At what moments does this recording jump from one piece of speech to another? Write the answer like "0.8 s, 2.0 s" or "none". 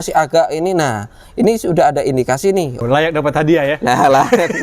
2.8 s